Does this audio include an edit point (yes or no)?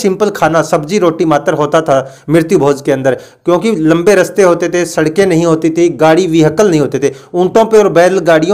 no